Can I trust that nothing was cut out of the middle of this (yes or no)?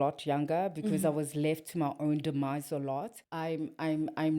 no